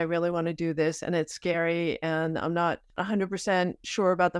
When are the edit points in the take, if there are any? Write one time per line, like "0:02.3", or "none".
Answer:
0:03.0